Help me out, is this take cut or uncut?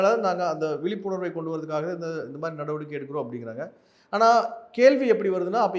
uncut